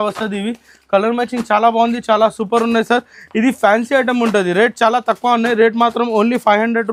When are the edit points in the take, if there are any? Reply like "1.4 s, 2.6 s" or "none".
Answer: none